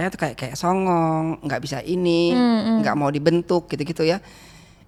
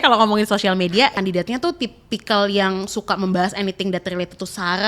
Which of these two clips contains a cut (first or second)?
second